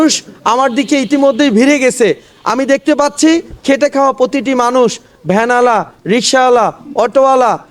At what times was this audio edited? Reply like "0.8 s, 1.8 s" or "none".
none